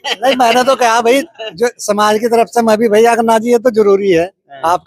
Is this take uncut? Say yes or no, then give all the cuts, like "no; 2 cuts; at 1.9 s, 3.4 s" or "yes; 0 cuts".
yes; 0 cuts